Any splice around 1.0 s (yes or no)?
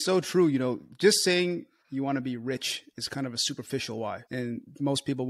no